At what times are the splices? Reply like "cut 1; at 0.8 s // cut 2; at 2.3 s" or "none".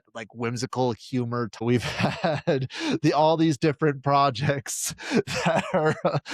cut 1; at 1.6 s